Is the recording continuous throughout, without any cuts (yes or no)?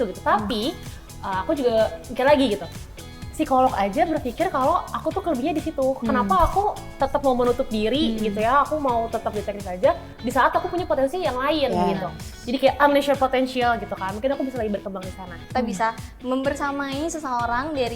no